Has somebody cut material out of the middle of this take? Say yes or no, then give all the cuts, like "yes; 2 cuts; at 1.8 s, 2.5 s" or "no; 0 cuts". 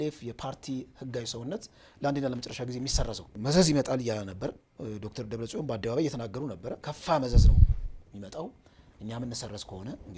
yes; 2 cuts; at 3.3 s, 6.9 s